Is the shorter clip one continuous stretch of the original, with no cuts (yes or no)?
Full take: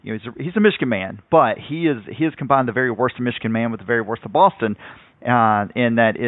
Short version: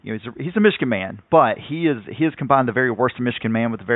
yes